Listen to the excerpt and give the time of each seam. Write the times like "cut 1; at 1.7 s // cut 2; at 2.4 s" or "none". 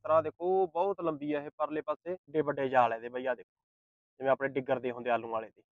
cut 1; at 1.9 s